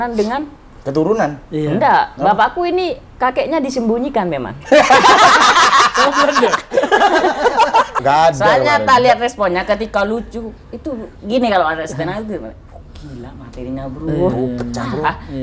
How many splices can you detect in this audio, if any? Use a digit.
1